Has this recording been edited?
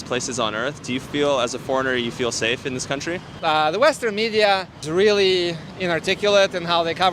no; 0 cuts

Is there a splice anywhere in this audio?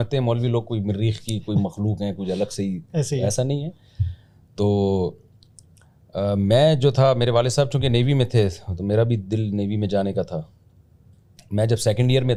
no; 0 cuts

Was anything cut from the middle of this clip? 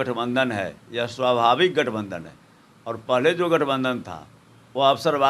no; 0 cuts

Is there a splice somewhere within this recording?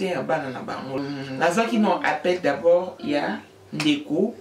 yes; 1 cut; at 1.0 s

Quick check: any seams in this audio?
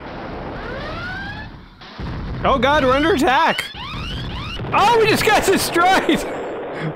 no; 0 cuts

